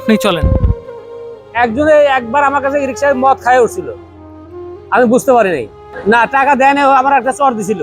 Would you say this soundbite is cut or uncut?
cut